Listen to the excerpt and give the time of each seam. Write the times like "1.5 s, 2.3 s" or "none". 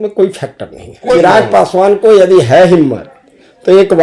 1.2 s